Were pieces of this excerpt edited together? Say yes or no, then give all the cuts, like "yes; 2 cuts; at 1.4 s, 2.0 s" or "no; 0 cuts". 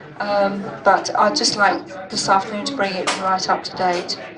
yes; 1 cut; at 1.0 s